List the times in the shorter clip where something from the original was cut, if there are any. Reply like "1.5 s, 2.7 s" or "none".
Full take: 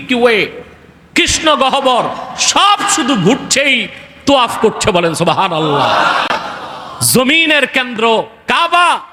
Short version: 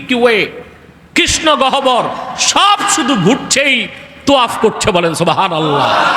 none